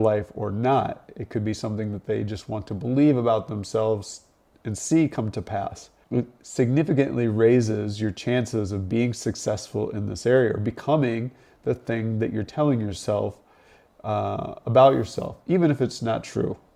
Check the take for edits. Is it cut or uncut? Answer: uncut